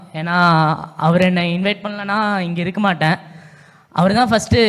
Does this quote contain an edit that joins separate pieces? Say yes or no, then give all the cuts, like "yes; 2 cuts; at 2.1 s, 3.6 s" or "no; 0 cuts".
no; 0 cuts